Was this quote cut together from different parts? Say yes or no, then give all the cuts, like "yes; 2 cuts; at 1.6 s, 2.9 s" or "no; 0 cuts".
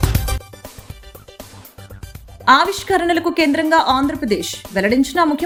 no; 0 cuts